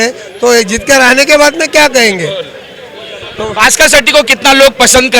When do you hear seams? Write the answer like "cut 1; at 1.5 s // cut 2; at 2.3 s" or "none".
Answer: none